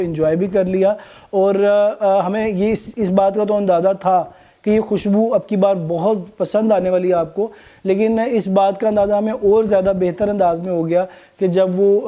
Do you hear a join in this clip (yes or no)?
no